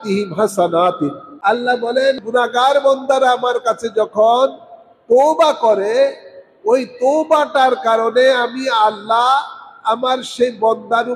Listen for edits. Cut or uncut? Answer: cut